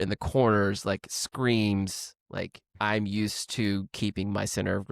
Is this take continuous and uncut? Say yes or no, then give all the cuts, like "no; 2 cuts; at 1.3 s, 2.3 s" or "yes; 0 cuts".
no; 1 cut; at 2.7 s